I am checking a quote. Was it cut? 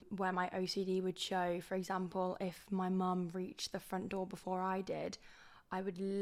no; 0 cuts

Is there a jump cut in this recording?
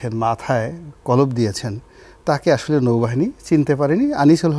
no; 0 cuts

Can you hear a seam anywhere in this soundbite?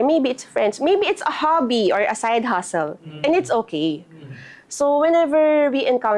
no; 0 cuts

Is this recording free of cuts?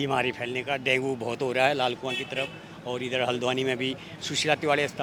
yes; 0 cuts

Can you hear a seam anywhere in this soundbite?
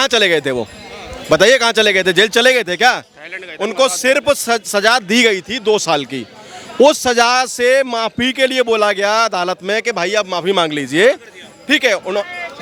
no; 0 cuts

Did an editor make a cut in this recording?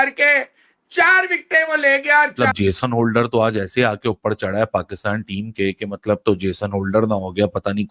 yes; 1 cut; at 2.3 s

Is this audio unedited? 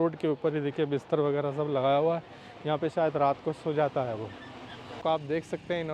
no; 1 cut; at 5.0 s

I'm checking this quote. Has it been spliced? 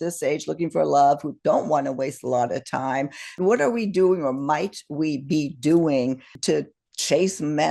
yes; 2 cuts; at 3.3 s, 6.3 s

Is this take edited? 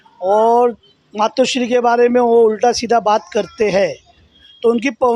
no; 0 cuts

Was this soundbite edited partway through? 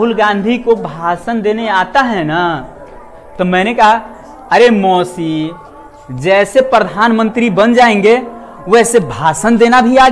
no; 0 cuts

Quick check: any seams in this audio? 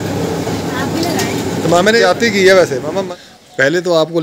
yes; 2 cuts; at 2.0 s, 3.1 s

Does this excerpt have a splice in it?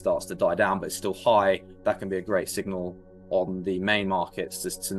no; 0 cuts

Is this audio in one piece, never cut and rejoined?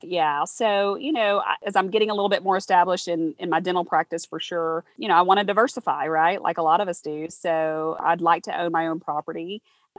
no; 3 cuts; at 1.6 s, 5.0 s, 8.0 s

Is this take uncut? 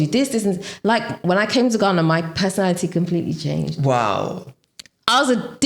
yes; 0 cuts

